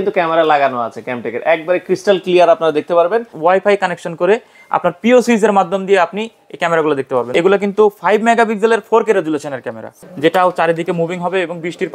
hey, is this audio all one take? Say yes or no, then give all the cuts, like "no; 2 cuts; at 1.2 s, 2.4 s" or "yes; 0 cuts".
no; 3 cuts; at 3.3 s, 7.3 s, 9.9 s